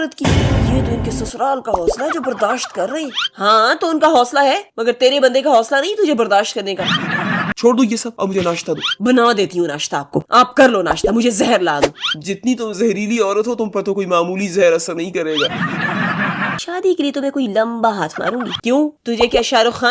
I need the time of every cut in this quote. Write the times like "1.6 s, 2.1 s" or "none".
7.5 s, 16.6 s, 18.5 s